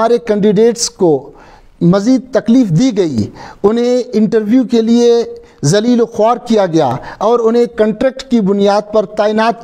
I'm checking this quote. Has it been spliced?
no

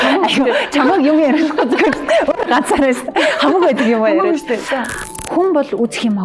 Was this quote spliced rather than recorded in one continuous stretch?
yes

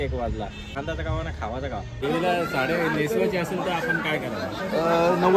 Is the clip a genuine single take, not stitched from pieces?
no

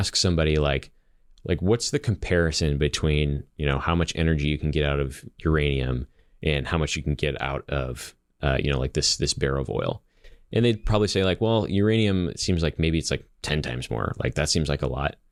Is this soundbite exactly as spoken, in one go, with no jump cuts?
yes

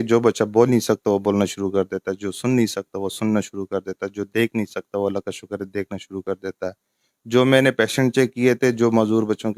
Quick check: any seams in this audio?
no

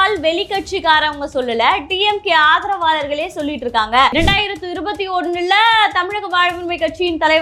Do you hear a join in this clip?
yes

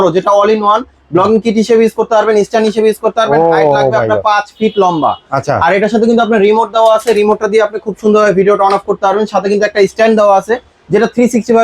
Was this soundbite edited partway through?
no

